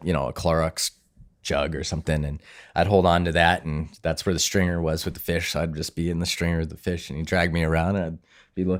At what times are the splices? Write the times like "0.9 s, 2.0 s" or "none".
none